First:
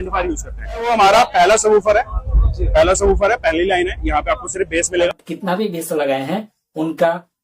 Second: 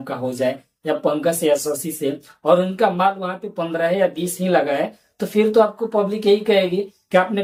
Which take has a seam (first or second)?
first